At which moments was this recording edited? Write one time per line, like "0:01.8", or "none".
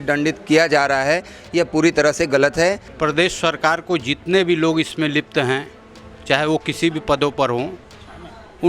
0:02.9